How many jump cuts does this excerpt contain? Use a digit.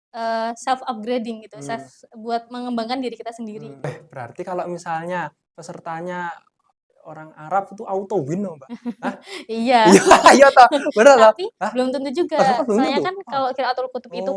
1